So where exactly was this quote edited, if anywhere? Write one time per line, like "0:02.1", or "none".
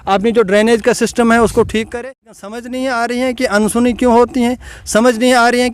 0:01.9